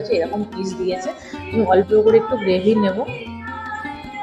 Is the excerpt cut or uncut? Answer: uncut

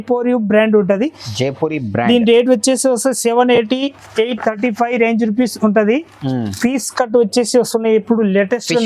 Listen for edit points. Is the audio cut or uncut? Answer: cut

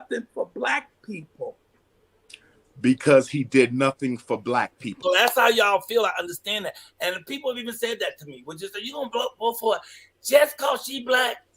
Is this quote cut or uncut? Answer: cut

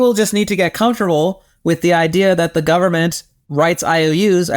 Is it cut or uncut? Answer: uncut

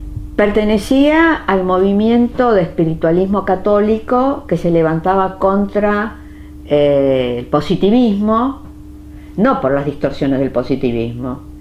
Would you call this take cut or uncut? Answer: uncut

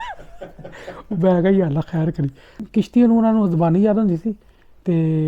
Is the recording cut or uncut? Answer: cut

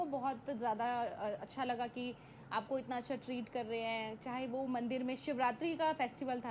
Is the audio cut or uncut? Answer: uncut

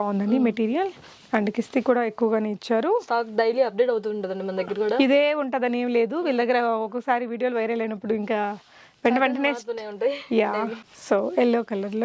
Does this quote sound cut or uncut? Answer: uncut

